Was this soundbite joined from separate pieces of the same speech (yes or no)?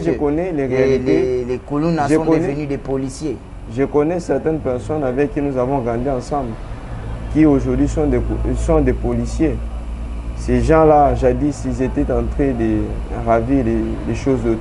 no